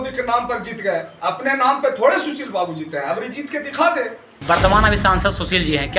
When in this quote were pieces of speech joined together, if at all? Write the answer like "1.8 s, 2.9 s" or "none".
4.4 s